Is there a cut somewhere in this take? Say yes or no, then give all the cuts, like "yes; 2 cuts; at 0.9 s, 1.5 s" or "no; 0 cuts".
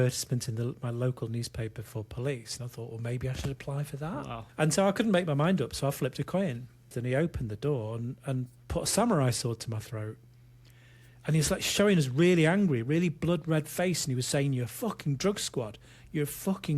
yes; 2 cuts; at 4.4 s, 6.9 s